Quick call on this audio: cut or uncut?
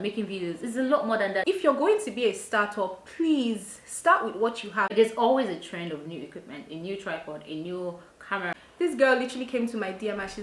cut